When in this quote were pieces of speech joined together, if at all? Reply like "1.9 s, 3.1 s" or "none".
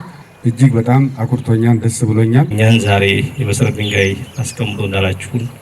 2.5 s